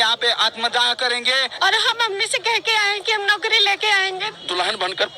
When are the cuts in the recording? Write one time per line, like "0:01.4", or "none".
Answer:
0:01.5
0:04.3